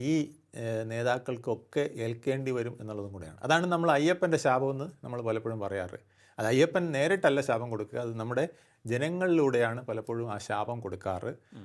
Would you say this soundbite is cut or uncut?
uncut